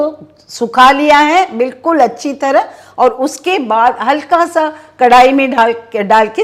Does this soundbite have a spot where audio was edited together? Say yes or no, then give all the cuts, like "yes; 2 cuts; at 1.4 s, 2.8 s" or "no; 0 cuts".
no; 0 cuts